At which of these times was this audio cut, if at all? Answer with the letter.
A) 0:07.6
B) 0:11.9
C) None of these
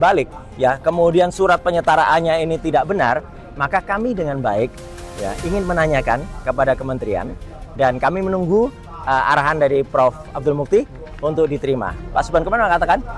B